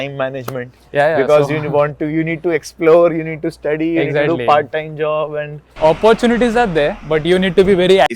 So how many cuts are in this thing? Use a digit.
1